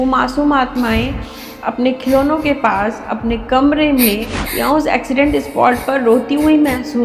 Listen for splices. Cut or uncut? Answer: uncut